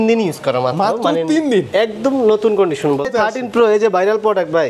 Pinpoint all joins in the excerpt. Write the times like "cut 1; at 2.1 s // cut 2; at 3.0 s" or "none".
cut 1; at 3.0 s